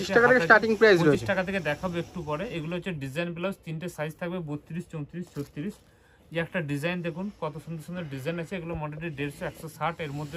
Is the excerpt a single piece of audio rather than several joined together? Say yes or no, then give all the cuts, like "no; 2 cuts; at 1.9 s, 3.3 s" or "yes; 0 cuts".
yes; 0 cuts